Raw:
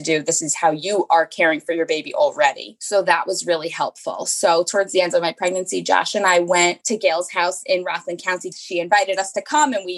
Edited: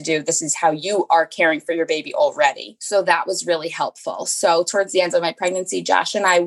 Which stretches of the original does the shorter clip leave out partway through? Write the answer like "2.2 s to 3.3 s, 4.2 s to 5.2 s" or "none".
none